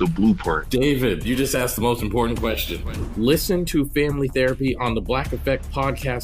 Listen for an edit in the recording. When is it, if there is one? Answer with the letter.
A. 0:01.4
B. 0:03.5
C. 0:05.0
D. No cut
D